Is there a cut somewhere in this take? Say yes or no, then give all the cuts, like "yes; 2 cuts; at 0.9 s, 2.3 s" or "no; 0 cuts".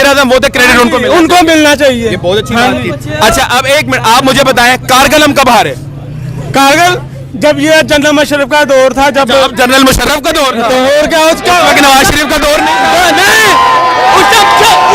no; 0 cuts